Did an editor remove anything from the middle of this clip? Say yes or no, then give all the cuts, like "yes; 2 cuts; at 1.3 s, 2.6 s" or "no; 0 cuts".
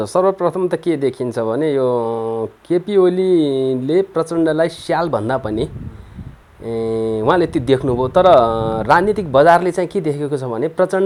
no; 0 cuts